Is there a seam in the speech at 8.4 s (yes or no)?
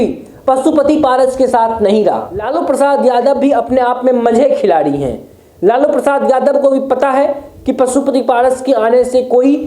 no